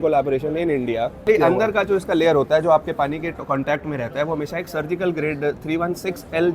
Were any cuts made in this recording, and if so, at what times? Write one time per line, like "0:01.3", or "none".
0:01.3